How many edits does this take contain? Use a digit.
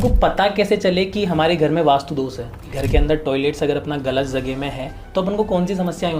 1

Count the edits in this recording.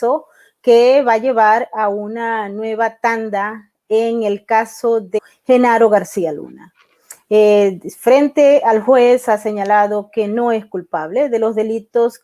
1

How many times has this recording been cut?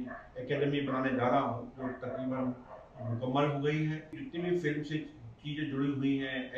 1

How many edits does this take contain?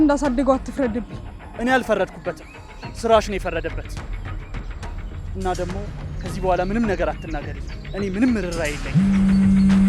1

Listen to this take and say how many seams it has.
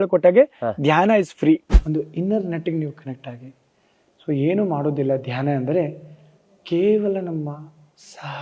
1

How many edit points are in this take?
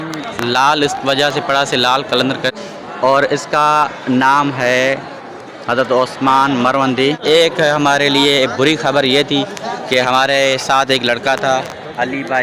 2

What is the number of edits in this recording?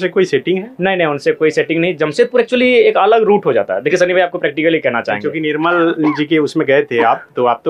0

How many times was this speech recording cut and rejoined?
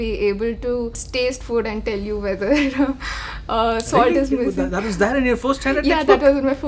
1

